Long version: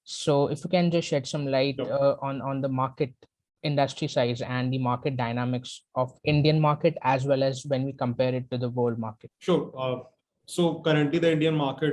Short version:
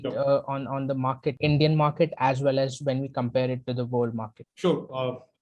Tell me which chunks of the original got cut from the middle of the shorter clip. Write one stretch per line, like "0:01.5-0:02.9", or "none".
0:03.1-0:06.2

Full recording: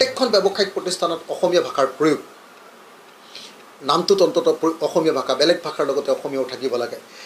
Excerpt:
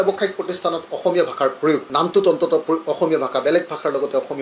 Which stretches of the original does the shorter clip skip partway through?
0:02.2-0:03.8

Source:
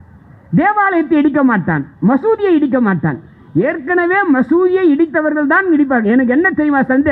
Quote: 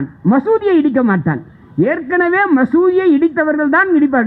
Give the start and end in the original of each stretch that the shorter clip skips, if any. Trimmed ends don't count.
none

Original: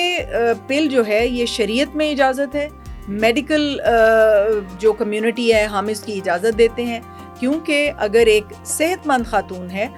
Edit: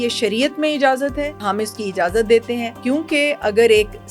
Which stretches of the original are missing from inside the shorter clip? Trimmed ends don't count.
0:02.8-0:05.7
0:07.0-0:07.3

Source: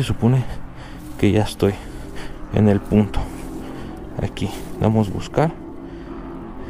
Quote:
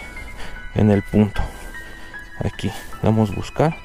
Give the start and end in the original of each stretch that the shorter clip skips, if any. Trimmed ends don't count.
none

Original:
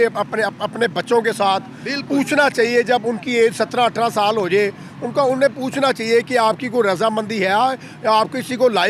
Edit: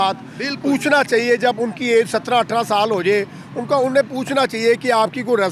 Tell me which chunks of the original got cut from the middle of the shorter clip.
none

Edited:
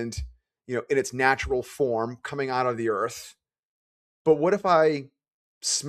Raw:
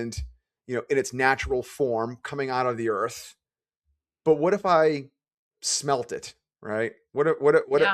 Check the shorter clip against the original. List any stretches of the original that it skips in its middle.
none

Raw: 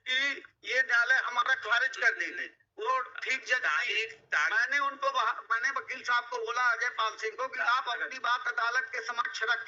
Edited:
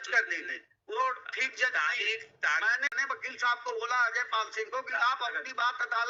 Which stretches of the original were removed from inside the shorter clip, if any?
0:04.8-0:05.6

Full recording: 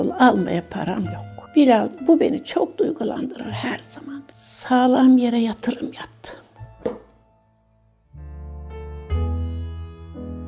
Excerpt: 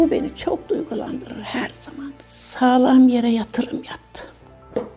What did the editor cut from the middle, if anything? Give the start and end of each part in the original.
none

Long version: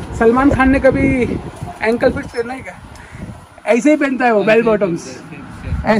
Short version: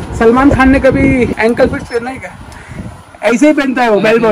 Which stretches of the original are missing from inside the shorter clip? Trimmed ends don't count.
0:01.3-0:01.8

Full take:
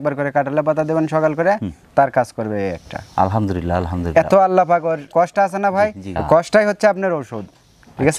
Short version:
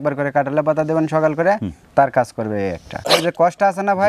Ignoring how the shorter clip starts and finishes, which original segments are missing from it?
0:03.1-0:04.9

